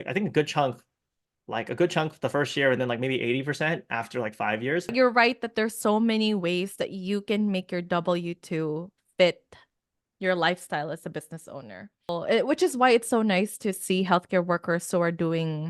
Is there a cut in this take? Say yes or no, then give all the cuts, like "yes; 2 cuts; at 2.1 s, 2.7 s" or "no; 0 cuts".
yes; 2 cuts; at 4.9 s, 12.1 s